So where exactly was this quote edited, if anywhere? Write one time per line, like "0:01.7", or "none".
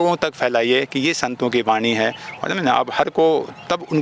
none